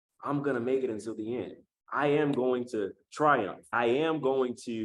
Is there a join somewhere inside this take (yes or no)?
yes